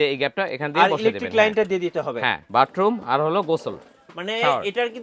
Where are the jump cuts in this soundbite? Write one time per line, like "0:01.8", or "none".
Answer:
0:02.4

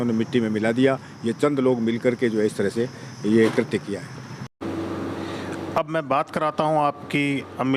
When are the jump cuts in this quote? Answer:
none

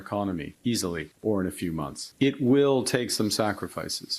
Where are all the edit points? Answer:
0:01.0
0:02.0

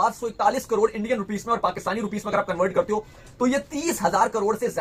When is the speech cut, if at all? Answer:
none

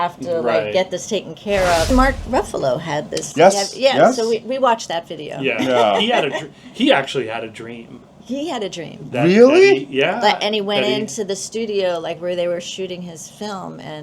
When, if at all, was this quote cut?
0:01.9

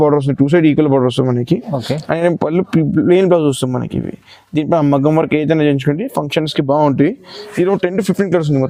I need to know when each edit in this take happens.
none

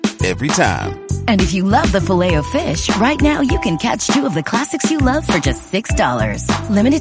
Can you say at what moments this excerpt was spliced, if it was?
none

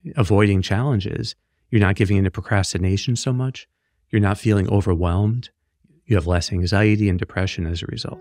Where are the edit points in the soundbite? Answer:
none

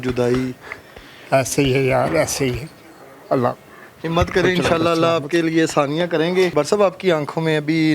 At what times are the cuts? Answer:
0:06.5

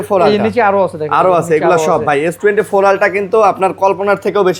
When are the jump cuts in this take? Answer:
none

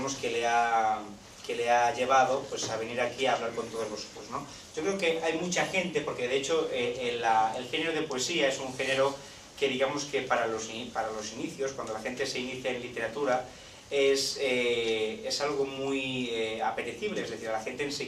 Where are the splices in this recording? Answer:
0:04.2

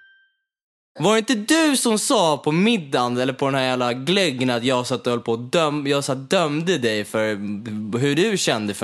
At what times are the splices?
0:00.9

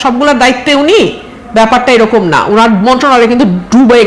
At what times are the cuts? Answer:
none

